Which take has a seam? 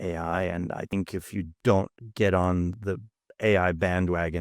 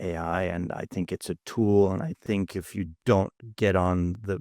first; 1 cut; at 0.9 s

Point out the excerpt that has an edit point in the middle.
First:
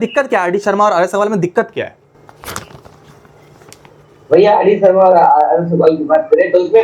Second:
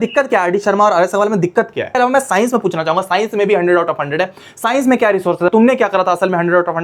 second; 2 cuts; at 2.0 s, 5.5 s

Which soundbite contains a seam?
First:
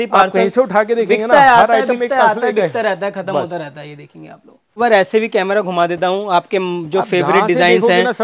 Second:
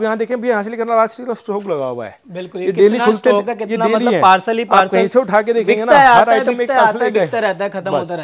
first; 1 cut; at 4.8 s

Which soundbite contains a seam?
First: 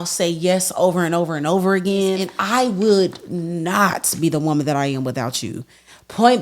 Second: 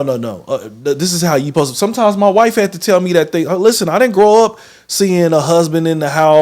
first; 1 cut; at 2.3 s

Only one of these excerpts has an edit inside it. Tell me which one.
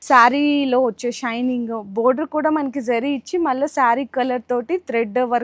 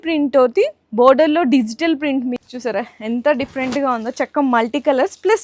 second; 1 cut; at 2.3 s

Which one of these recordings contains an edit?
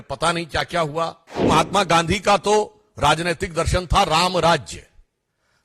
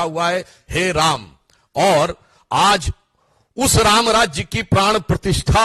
first; 1 cut; at 1.5 s

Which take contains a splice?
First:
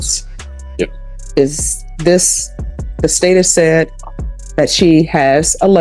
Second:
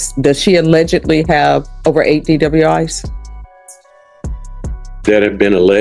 second; 2 cuts; at 3.5 s, 5.0 s

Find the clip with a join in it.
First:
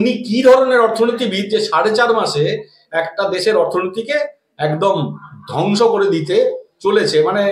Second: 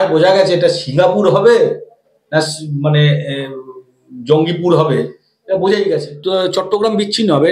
second; 1 cut; at 6.2 s

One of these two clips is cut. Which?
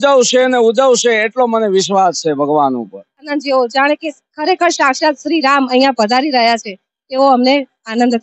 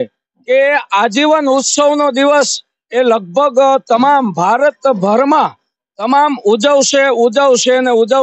first; 1 cut; at 3.2 s

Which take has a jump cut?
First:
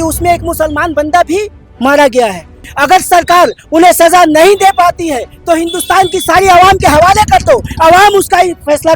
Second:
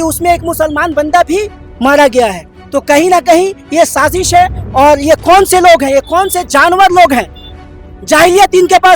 first; 1 cut; at 2.6 s

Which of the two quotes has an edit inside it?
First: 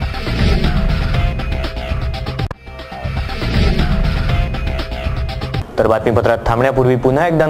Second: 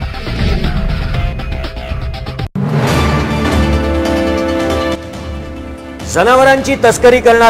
second; 1 cut; at 2.4 s

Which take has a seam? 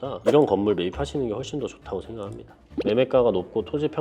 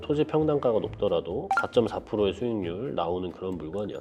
first; 1 cut; at 2.7 s

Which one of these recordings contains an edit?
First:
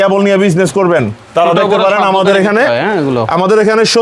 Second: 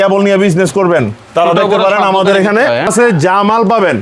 second; 1 cut; at 2.9 s

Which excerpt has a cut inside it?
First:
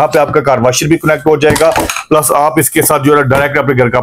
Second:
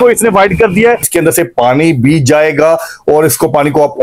second; 1 cut; at 1.1 s

